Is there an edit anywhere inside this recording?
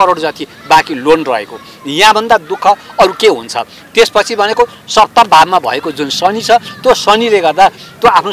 no; 0 cuts

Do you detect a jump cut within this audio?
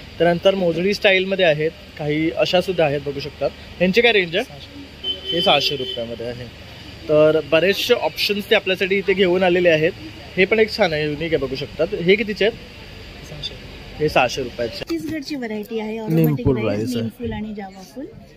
yes; 1 cut; at 14.8 s

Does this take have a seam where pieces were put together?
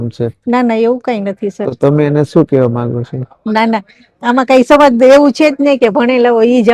no; 0 cuts

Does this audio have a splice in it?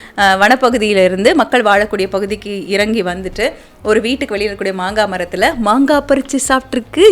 no; 0 cuts

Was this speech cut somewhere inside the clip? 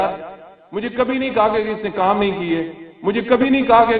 no; 0 cuts

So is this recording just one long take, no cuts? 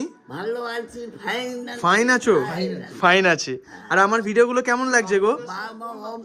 yes; 0 cuts

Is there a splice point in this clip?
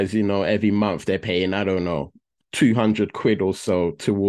no; 0 cuts

